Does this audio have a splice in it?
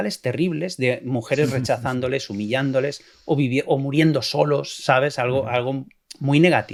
no; 0 cuts

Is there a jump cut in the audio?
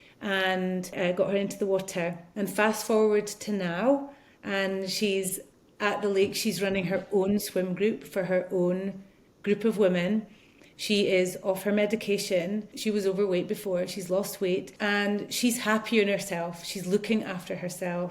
yes; 4 cuts; at 0.9 s, 2.2 s, 12.7 s, 14.7 s

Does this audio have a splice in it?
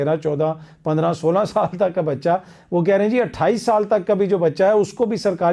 no; 0 cuts

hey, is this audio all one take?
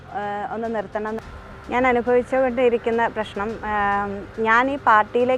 no; 1 cut; at 1.2 s

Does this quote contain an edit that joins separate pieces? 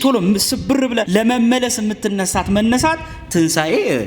yes; 1 cut; at 1.1 s

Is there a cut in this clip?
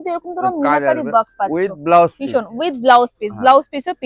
no; 0 cuts

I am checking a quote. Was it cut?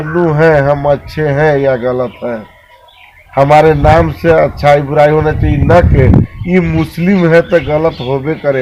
no; 0 cuts

